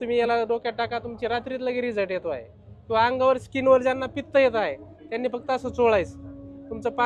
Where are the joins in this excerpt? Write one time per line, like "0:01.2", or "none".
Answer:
none